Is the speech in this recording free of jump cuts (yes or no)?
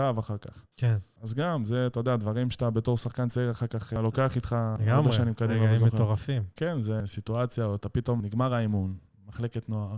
no